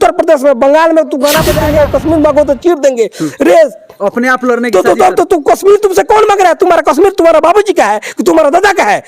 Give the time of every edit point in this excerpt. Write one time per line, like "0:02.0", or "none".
0:01.6